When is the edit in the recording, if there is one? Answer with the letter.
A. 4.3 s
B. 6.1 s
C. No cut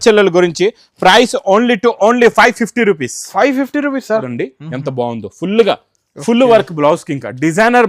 A